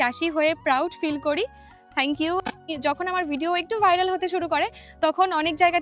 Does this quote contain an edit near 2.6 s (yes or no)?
yes